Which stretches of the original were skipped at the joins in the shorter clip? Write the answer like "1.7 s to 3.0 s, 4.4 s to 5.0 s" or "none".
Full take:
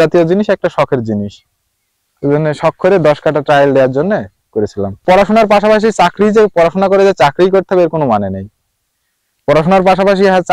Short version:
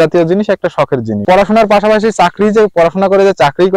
1.2 s to 5.0 s